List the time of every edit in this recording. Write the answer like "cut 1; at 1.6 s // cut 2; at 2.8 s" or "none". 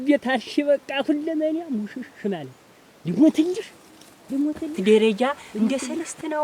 cut 1; at 4.8 s